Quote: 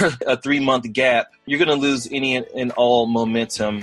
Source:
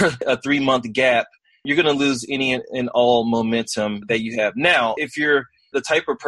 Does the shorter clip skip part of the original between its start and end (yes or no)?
yes